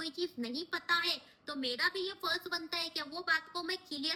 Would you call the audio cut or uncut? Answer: uncut